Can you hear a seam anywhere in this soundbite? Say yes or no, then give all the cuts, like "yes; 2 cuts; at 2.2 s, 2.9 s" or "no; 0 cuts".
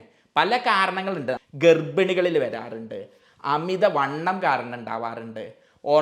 yes; 1 cut; at 1.4 s